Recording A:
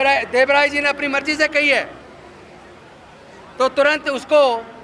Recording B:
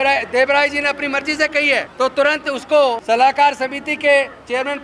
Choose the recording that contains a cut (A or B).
B